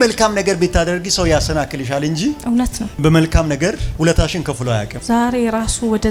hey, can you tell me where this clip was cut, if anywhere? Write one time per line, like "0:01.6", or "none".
none